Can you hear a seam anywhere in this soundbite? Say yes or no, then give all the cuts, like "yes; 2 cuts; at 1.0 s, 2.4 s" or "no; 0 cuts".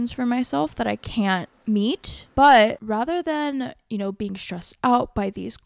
yes; 2 cuts; at 1.5 s, 2.8 s